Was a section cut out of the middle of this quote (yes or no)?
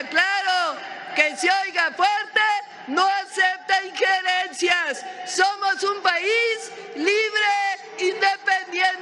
no